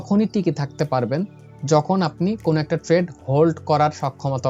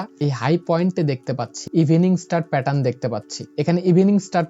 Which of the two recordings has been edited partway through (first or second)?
second